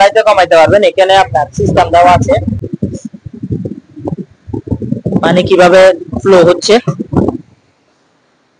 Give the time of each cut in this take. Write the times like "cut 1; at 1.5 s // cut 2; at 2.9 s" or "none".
cut 1; at 2.6 s